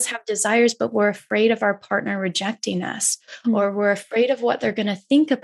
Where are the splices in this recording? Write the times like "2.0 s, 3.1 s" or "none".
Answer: none

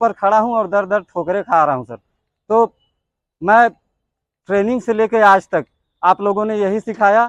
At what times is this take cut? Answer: none

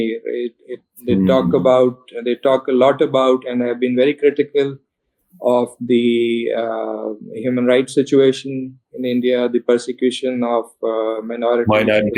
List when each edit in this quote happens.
none

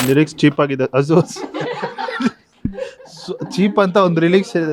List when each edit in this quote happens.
none

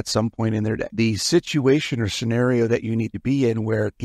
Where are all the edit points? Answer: none

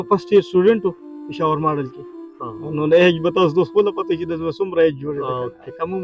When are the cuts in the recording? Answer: none

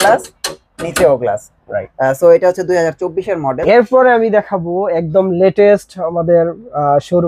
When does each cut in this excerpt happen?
3.6 s

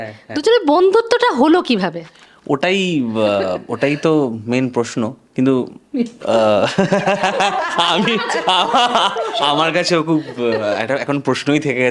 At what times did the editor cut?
none

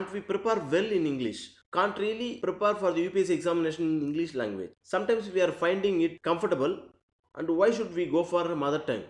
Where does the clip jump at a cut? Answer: 1.6 s

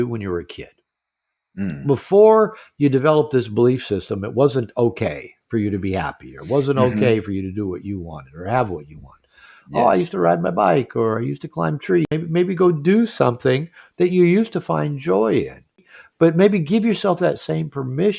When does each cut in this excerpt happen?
12.1 s, 15.9 s

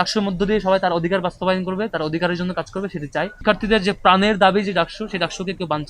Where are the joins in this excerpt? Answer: 3.4 s

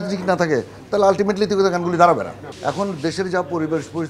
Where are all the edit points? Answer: 2.4 s

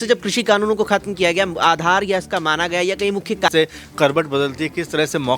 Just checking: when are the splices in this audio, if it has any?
3.5 s

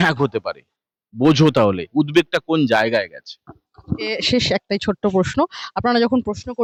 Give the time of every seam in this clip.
none

